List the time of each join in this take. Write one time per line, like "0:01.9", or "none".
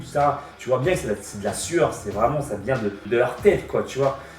0:03.0